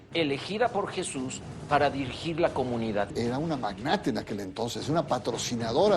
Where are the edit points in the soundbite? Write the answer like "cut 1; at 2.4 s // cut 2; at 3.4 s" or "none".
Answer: cut 1; at 3.1 s